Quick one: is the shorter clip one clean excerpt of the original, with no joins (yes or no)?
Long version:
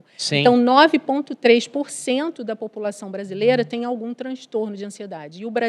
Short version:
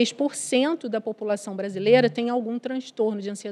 yes